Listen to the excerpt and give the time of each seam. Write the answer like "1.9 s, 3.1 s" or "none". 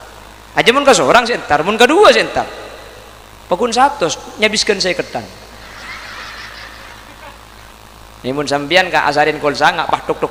none

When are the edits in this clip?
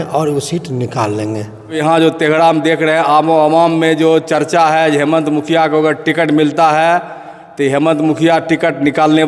1.7 s

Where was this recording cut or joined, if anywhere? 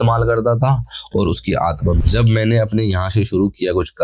2.0 s

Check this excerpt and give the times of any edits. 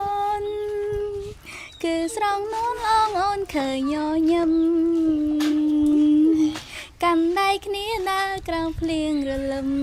none

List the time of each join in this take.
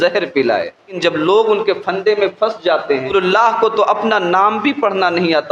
0.9 s, 3.1 s

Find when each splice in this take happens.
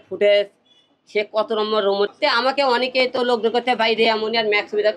2.1 s

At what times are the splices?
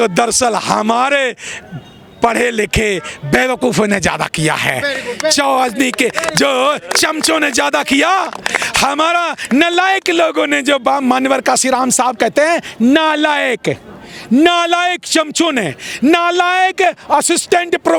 none

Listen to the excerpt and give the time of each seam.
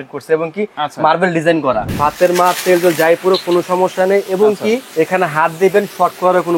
1.8 s, 4.9 s

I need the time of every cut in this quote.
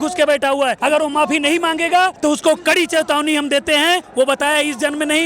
0.8 s, 2.1 s, 4.1 s

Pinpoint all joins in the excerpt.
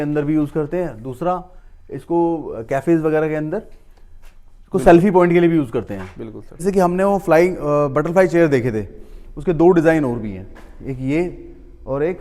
6.6 s

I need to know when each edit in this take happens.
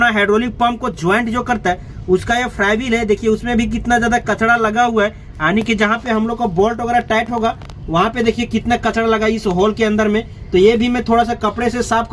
none

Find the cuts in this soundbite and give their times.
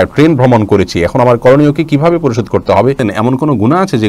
3.0 s

